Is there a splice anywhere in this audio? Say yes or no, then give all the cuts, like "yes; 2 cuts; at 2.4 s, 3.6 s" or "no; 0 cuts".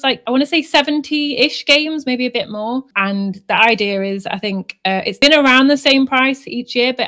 no; 0 cuts